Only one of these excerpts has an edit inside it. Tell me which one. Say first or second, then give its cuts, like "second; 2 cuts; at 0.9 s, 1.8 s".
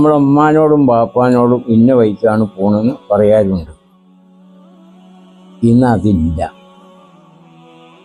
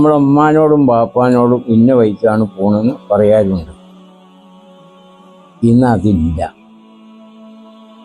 second; 3 cuts; at 4.0 s, 5.6 s, 7.1 s